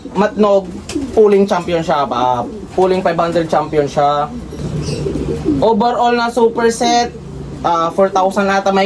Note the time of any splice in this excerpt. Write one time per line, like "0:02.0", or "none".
none